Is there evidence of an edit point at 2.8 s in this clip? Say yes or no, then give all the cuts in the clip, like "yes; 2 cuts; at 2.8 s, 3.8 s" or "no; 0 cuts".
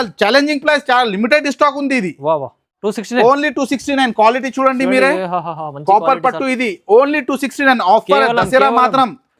yes; 1 cut; at 2.8 s